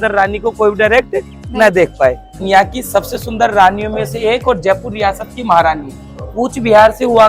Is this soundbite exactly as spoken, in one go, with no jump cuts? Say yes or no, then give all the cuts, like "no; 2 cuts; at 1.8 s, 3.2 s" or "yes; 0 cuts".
no; 1 cut; at 2.3 s